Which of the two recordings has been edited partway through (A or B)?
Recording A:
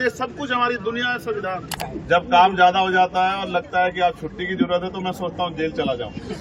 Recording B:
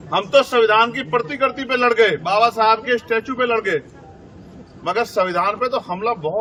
A